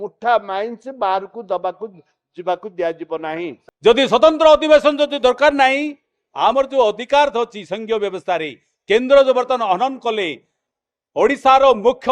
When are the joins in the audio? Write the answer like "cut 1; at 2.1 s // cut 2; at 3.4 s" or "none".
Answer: cut 1; at 3.6 s